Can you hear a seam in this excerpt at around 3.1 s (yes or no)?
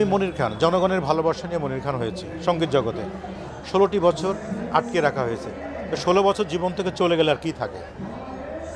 no